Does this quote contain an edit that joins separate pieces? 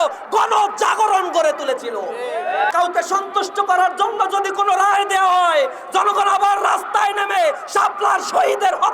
yes; 1 cut; at 2.7 s

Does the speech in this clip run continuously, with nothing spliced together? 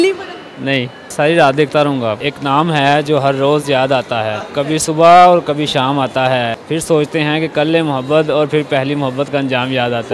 no; 4 cuts; at 1.1 s, 2.2 s, 4.4 s, 6.6 s

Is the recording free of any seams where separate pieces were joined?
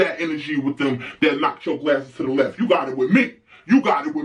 yes; 0 cuts

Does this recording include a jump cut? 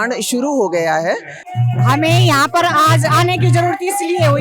yes; 1 cut; at 1.4 s

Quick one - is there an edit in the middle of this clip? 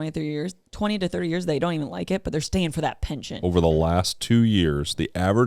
yes; 1 cut; at 3.4 s

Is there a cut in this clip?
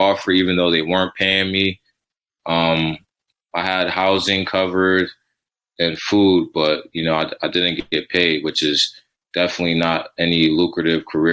no; 0 cuts

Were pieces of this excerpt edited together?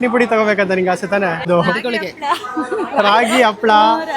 yes; 1 cut; at 1.5 s

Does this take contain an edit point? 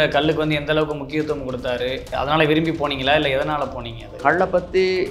yes; 2 cuts; at 2.1 s, 4.2 s

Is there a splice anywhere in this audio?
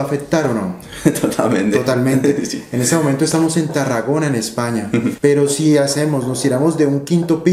yes; 1 cut; at 5.2 s

